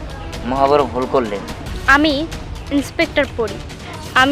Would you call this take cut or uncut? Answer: cut